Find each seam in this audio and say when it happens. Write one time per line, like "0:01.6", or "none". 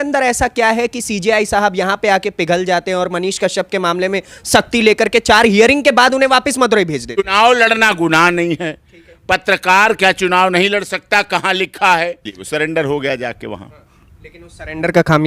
0:07.2
0:12.3

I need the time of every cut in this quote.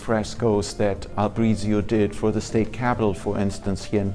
0:01.1

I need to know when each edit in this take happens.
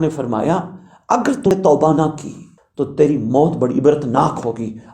0:01.5

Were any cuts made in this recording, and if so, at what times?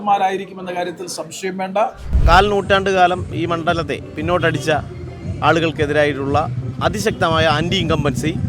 0:02.1

